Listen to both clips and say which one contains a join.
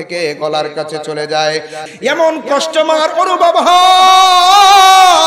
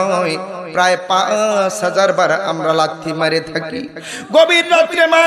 first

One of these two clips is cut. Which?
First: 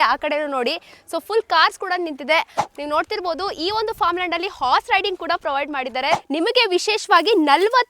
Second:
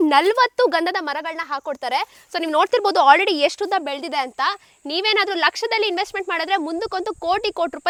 first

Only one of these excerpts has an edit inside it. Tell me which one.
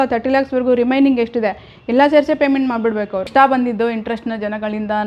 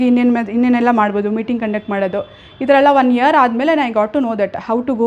first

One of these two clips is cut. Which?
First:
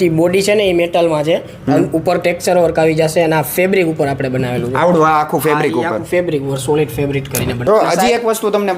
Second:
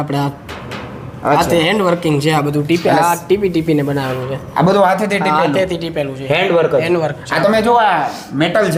first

